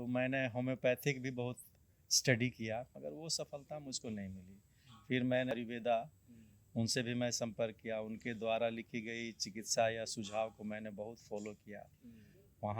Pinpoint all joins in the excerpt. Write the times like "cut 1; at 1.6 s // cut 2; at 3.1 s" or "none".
cut 1; at 3.0 s // cut 2; at 5.5 s